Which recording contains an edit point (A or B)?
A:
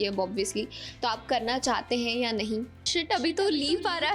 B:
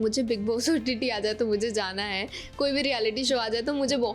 A